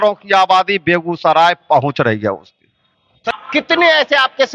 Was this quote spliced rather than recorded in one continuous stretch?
yes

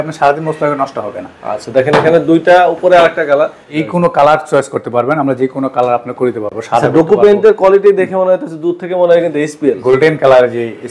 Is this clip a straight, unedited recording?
no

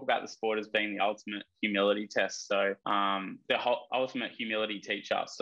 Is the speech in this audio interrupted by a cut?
yes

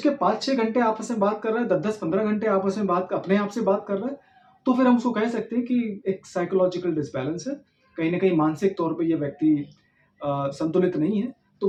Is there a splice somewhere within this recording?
no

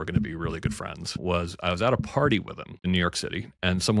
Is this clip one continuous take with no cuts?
no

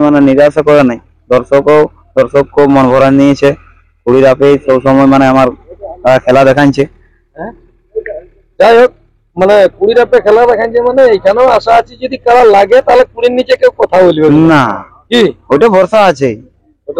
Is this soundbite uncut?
yes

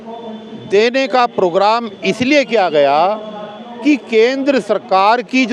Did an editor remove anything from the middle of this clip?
no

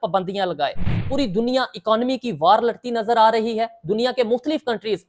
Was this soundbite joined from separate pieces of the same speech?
yes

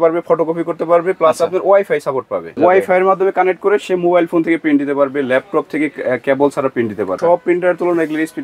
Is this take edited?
yes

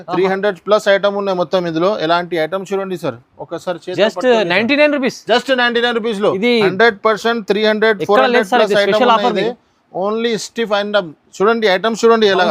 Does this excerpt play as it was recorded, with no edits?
yes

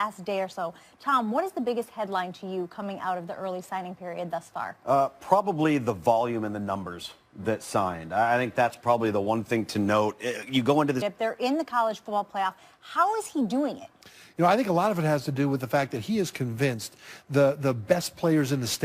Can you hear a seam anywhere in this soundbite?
no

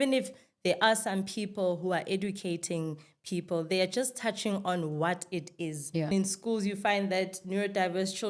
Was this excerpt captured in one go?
no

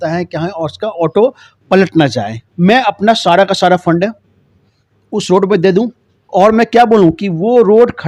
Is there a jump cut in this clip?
yes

